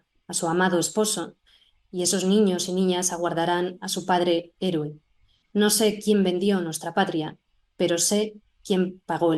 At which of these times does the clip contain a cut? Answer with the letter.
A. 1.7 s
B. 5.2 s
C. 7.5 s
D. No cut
D